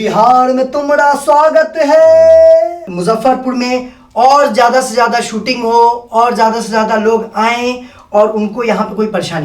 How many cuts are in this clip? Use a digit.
1